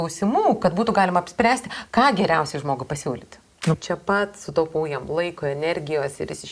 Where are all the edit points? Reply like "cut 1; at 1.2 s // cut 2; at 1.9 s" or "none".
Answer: cut 1; at 3.7 s